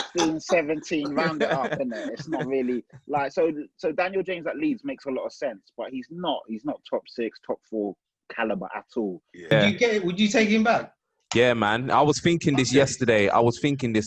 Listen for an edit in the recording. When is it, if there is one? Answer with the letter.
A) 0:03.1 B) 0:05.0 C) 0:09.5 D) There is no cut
C